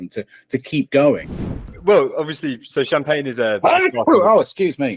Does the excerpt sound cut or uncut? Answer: cut